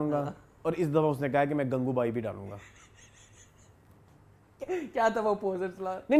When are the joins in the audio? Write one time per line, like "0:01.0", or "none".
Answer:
none